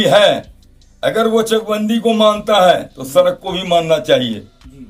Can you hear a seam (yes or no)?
no